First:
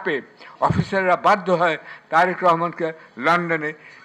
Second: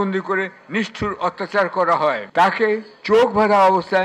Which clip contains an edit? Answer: second; 1 cut; at 2.2 s

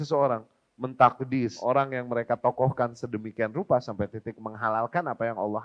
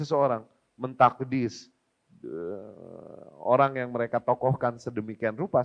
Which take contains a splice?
first; 1 cut; at 1.6 s

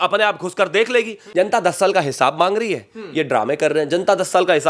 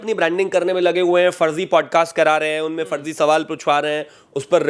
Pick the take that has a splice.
first; 1 cut; at 1.2 s

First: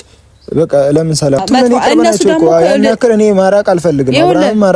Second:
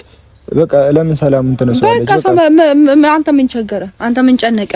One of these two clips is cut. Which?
first; 1 cut; at 1.4 s

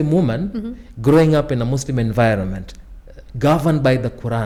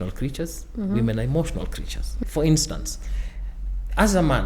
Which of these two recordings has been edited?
second; 1 cut; at 2.2 s

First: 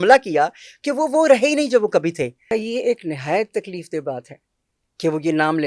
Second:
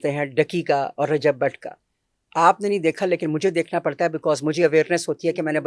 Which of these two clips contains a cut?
first; 1 cut; at 2.4 s

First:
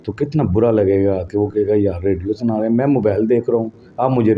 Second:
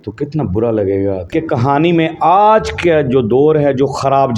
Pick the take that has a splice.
second; 1 cut; at 1.2 s

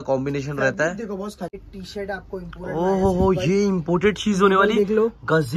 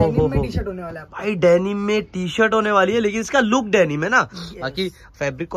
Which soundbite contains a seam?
first; 1 cut; at 1.6 s

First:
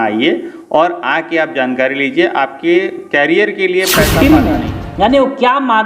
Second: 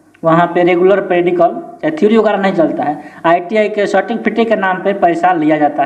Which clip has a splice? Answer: first; 1 cut; at 4.1 s

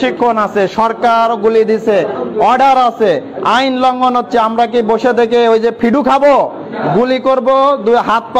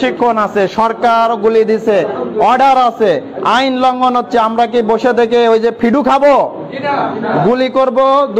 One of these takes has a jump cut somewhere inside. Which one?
first; 1 cut; at 6.7 s

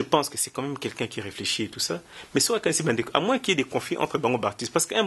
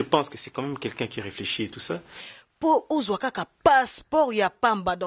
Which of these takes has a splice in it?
second; 1 cut; at 2.1 s

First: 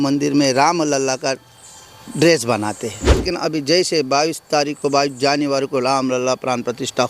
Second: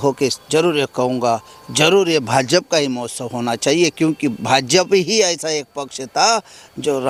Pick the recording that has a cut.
first; 1 cut; at 3.2 s

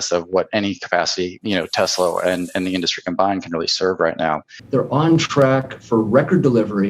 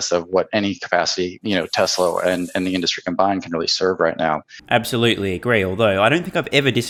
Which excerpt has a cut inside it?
first; 1 cut; at 4.5 s

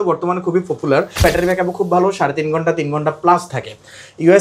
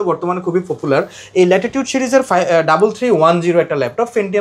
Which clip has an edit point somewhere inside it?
first; 1 cut; at 1.2 s

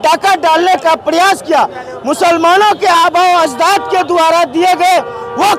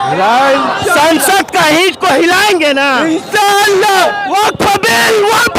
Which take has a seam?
second; 1 cut; at 4.0 s

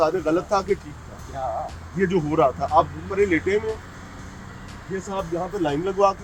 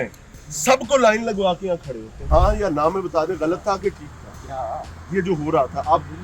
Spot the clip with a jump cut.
second; 1 cut; at 2.3 s

